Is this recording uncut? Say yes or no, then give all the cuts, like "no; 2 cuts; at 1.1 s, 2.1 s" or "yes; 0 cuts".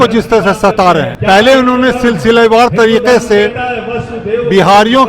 no; 1 cut; at 1.1 s